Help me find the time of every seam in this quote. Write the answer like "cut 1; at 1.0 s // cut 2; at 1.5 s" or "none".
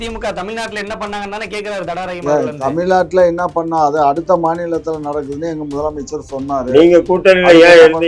none